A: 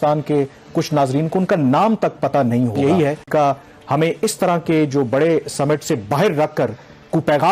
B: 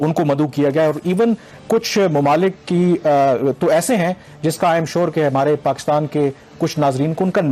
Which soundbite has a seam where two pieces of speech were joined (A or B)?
A